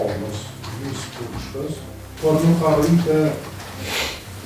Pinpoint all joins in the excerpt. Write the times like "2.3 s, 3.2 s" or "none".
2.1 s